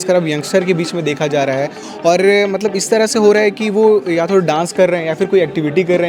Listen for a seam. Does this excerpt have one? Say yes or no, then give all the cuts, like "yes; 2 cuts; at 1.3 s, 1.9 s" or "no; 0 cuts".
no; 0 cuts